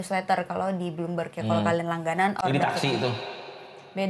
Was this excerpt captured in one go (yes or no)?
yes